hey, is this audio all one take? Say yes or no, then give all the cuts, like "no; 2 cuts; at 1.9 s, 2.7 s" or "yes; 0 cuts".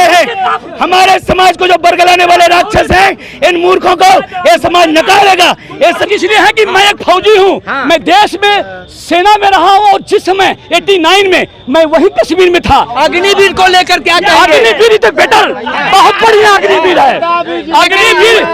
no; 1 cut; at 6.0 s